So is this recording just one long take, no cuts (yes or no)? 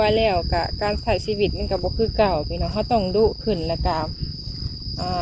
yes